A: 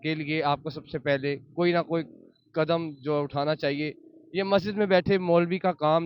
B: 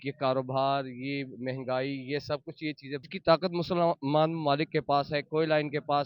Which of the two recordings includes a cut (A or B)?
B